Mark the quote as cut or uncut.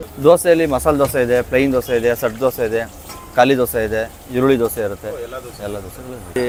uncut